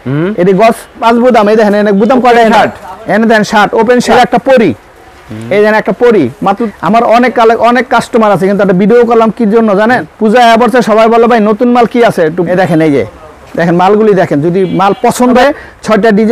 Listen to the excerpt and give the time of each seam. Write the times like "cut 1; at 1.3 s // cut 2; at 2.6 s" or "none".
cut 1; at 1.0 s // cut 2; at 4.1 s // cut 3; at 6.6 s // cut 4; at 10.1 s // cut 5; at 12.5 s // cut 6; at 15.4 s